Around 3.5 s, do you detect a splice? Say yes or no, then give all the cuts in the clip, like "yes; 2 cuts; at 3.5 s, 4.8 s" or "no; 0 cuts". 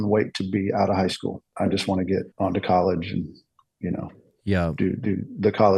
no; 2 cuts; at 1.5 s, 2.3 s